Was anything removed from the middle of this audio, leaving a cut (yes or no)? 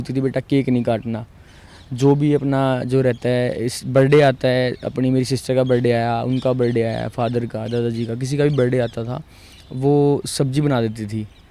no